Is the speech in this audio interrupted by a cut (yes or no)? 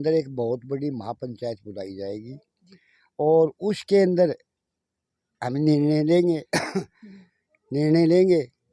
no